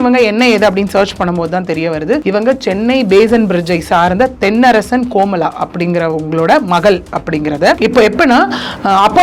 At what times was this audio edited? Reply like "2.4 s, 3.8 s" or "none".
2.2 s, 7.8 s